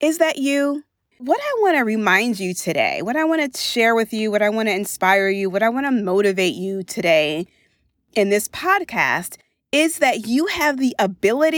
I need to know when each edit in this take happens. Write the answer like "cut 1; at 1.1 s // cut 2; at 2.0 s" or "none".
cut 1; at 1.1 s

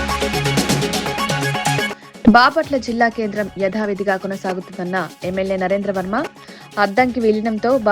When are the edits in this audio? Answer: none

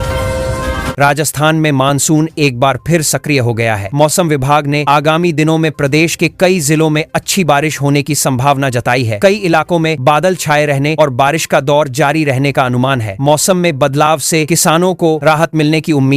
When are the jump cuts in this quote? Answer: cut 1; at 0.9 s

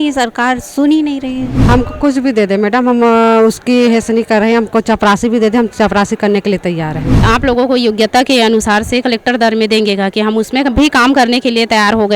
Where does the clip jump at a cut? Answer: cut 1; at 1.6 s // cut 2; at 7.2 s

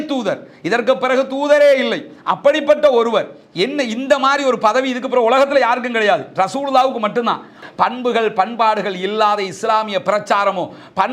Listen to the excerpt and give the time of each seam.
cut 1; at 7.5 s

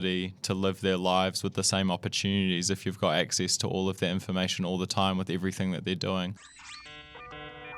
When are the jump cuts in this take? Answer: cut 1; at 6.8 s

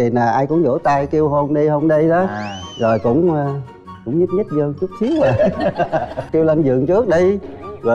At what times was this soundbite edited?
cut 1; at 6.2 s

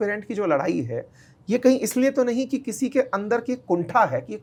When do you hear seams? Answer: none

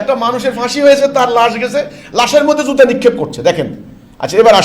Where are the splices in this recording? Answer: none

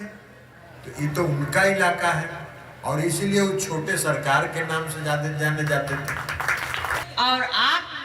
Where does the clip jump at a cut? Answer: cut 1; at 7.1 s

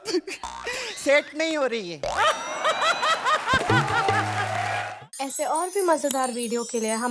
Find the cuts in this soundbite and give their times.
cut 1; at 4.8 s

